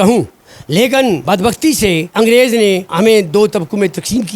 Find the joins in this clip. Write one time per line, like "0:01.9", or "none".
0:01.2
0:02.1
0:02.9